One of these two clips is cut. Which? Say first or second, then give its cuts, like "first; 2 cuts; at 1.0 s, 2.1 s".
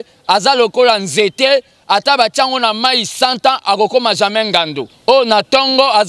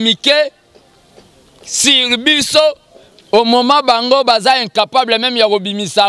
first; 1 cut; at 4.8 s